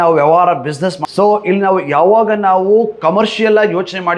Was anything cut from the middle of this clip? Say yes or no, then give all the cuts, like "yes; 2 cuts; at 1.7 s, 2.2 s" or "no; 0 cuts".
yes; 1 cut; at 1.0 s